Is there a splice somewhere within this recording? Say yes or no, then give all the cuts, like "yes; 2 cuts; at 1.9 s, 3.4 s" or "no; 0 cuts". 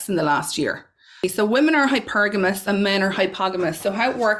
yes; 1 cut; at 1.2 s